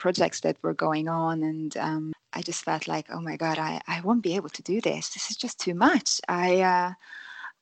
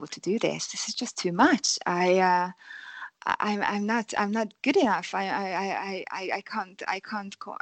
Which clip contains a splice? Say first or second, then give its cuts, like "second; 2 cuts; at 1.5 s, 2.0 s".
first; 1 cut; at 2.1 s